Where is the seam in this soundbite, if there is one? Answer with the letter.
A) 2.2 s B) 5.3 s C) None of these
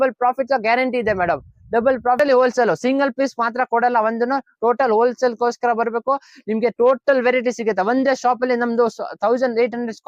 A